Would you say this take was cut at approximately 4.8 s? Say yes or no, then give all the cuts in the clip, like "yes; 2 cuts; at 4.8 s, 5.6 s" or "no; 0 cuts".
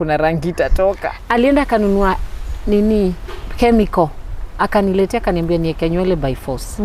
no; 1 cut; at 1.1 s